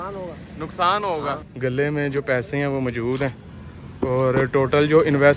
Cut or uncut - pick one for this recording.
cut